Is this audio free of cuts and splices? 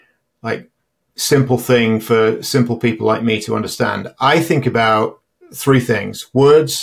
yes; 0 cuts

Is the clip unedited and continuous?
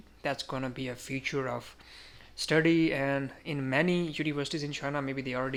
yes; 0 cuts

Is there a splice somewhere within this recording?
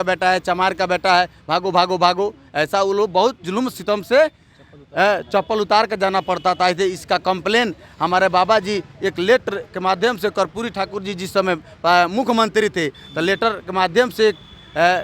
no; 0 cuts

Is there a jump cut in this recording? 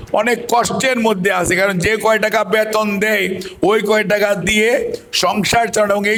no; 0 cuts

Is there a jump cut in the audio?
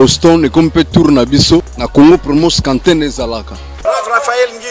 yes; 2 cuts; at 1.8 s, 3.7 s

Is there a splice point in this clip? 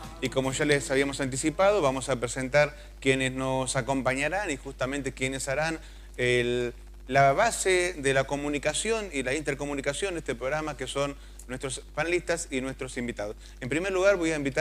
yes; 1 cut; at 12.6 s

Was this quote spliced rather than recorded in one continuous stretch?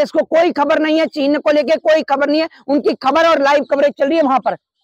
no; 0 cuts

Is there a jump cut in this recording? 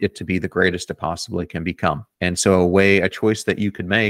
yes; 1 cut; at 2.1 s

